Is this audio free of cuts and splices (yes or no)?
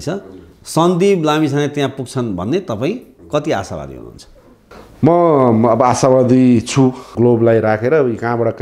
no